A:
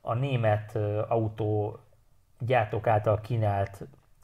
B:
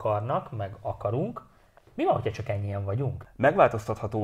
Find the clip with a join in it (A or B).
B